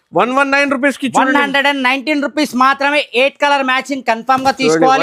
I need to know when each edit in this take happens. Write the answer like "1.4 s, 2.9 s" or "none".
none